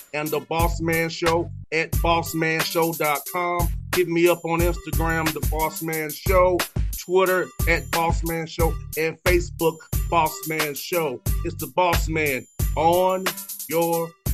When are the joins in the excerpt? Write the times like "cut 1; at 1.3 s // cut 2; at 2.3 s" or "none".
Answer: none